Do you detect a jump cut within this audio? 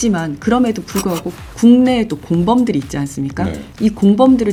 no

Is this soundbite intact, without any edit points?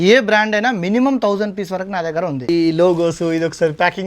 no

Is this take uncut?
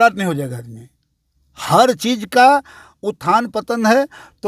yes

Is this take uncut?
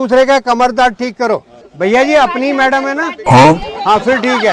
no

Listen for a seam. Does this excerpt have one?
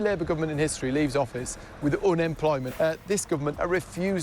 yes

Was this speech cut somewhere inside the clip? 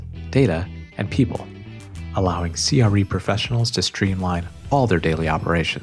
no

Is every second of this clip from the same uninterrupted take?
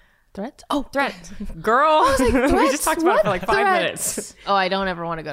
no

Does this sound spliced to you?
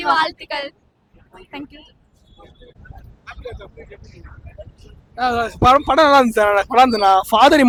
no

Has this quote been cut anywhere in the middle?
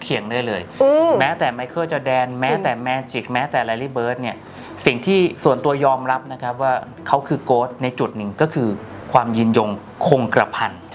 no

